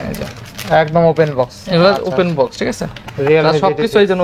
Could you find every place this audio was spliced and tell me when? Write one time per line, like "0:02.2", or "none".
none